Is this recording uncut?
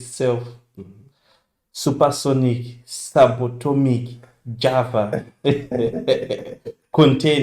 yes; 0 cuts

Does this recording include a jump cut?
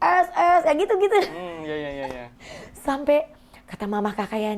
no; 0 cuts

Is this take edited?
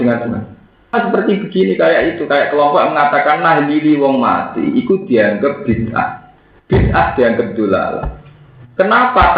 yes; 1 cut; at 0.9 s

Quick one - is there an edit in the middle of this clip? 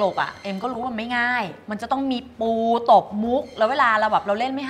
no; 0 cuts

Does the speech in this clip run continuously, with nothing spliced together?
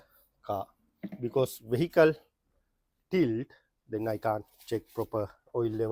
yes; 0 cuts

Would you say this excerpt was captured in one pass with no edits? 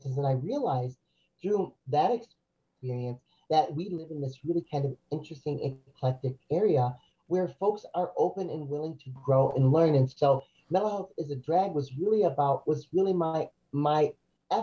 yes; 0 cuts

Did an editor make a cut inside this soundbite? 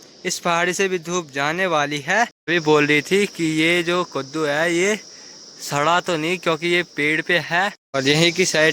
yes; 2 cuts; at 2.4 s, 7.8 s

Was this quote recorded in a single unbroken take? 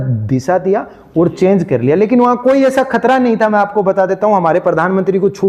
yes; 0 cuts

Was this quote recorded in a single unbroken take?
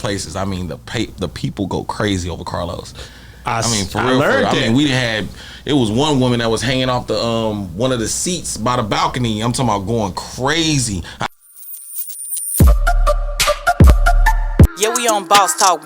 no; 1 cut; at 11.3 s

